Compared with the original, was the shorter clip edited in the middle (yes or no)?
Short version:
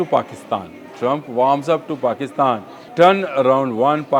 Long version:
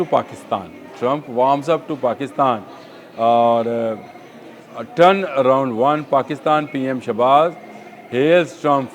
yes